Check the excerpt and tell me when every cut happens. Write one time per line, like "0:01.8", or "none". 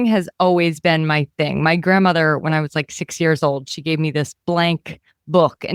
none